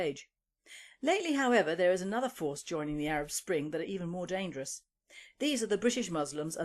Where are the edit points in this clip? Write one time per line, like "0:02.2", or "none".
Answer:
0:03.0